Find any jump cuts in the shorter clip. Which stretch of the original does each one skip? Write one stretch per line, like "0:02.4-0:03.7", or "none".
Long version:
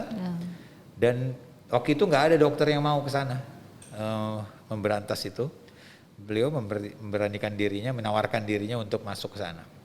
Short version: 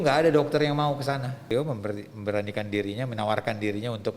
0:03.6-0:06.4